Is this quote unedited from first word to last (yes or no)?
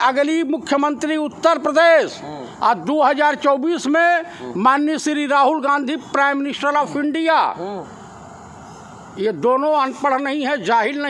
yes